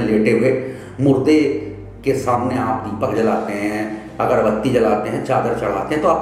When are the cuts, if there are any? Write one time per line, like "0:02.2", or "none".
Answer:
none